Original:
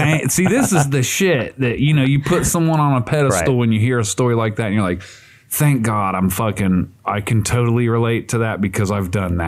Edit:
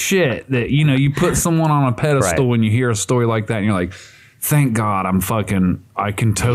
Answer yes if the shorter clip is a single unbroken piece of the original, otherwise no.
yes